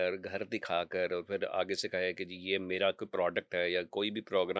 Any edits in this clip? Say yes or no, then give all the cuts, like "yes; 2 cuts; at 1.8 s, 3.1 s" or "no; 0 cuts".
no; 0 cuts